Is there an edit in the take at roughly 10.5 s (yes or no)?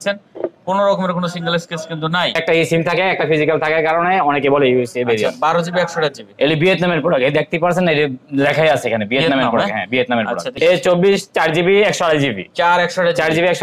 yes